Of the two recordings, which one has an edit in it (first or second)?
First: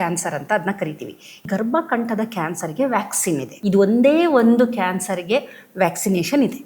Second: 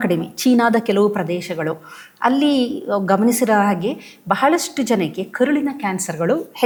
first